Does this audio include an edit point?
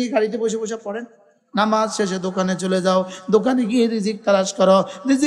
yes; 1 cut; at 1.4 s

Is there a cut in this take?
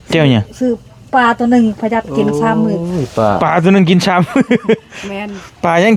no; 0 cuts

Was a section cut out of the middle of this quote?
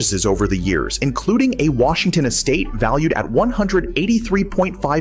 no; 0 cuts

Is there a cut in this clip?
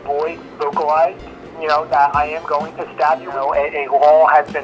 yes; 1 cut; at 3.5 s

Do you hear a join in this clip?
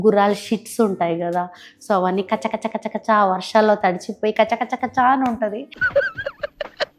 no; 0 cuts

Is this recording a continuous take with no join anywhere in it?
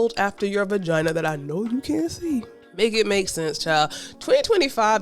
no; 1 cut; at 2.6 s

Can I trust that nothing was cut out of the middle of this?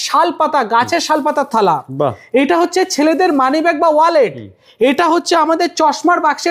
yes; 0 cuts

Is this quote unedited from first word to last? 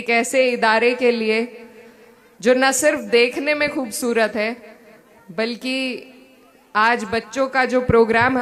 yes; 0 cuts

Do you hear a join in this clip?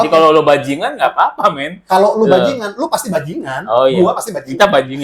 no; 0 cuts

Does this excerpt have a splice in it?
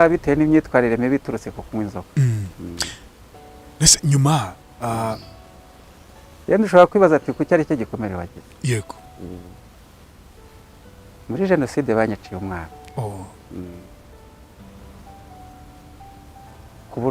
no; 0 cuts

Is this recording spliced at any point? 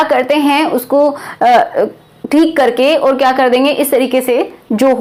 no; 0 cuts

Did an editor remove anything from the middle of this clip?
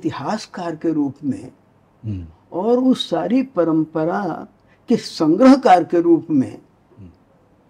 no; 0 cuts

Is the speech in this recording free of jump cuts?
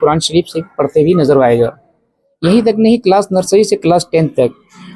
yes; 0 cuts

